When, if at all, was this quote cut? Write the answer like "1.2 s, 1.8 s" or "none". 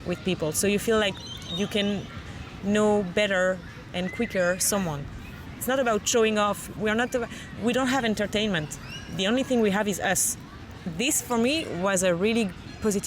5.6 s, 10.6 s